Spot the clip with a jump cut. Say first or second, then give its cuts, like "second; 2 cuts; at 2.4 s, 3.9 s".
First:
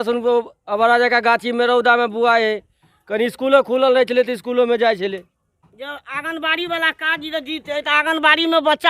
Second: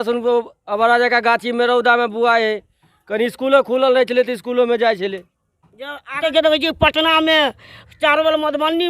second; 1 cut; at 6.2 s